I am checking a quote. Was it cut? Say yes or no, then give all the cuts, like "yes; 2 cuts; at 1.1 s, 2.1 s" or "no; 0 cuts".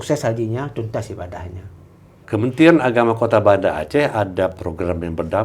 yes; 1 cut; at 2.1 s